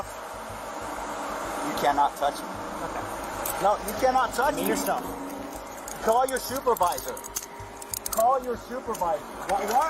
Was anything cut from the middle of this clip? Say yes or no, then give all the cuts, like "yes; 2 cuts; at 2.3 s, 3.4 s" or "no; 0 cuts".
no; 0 cuts